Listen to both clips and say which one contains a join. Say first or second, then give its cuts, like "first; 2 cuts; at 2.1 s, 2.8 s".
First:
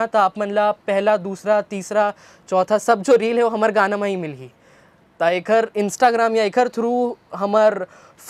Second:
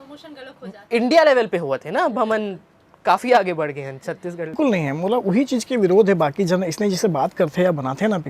second; 1 cut; at 4.6 s